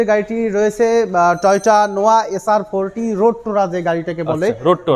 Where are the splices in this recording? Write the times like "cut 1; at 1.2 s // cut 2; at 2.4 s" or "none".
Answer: none